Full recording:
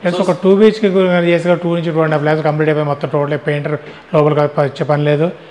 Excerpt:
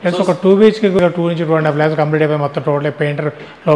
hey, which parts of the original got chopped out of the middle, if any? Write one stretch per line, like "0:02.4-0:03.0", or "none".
0:01.0-0:01.5